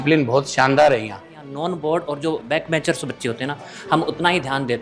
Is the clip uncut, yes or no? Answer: no